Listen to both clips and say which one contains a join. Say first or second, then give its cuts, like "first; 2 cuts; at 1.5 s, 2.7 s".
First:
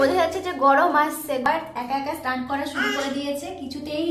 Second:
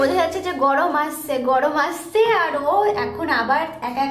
first; 1 cut; at 1.4 s